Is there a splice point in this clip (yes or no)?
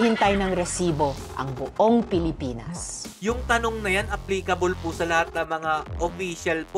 no